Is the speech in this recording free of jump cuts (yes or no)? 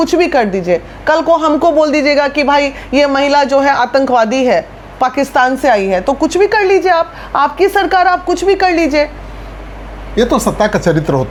yes